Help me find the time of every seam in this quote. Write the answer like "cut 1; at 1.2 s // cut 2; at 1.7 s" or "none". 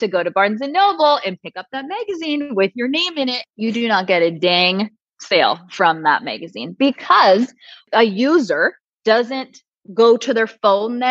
cut 1; at 3.4 s